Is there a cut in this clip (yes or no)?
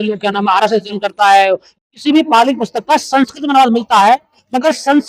yes